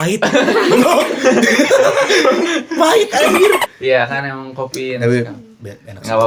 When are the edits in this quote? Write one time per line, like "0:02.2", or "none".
none